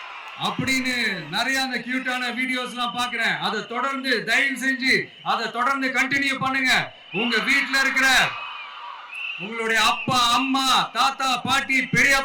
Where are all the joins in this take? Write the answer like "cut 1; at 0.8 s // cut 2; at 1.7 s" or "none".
none